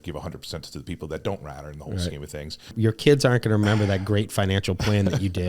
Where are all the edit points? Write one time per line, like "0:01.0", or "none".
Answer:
0:02.7